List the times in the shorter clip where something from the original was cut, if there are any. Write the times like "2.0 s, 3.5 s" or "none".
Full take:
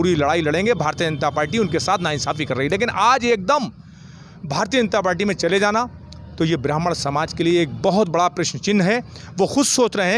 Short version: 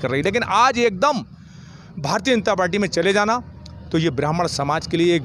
none